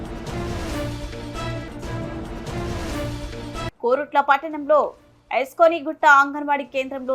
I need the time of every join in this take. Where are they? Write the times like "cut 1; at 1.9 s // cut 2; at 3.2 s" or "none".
cut 1; at 3.8 s